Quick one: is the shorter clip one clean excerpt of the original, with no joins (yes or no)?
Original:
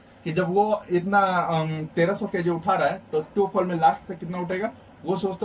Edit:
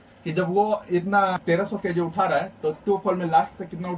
no